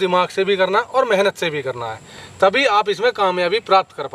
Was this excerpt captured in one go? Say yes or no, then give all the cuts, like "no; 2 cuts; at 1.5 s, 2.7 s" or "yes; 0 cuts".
yes; 0 cuts